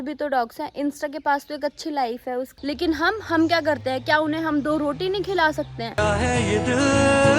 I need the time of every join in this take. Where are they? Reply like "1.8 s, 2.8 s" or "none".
2.5 s, 6.0 s